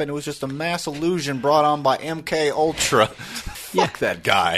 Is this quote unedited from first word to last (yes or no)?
no